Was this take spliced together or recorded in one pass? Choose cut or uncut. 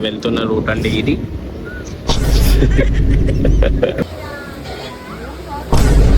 cut